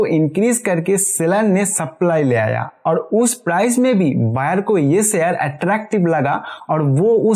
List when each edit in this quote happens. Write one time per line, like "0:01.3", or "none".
none